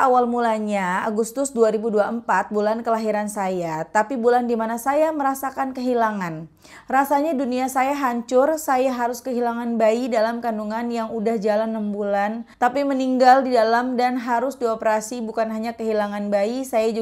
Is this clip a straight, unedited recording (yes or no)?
no